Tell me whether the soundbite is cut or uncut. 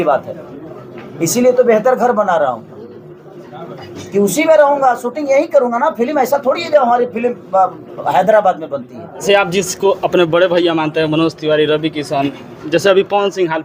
cut